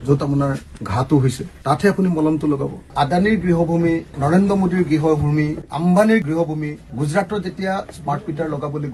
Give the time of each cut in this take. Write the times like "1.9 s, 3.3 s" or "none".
2.8 s